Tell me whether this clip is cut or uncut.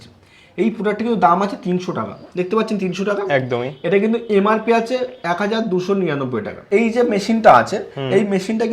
cut